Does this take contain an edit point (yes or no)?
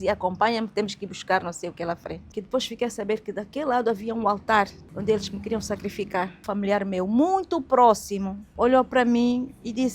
yes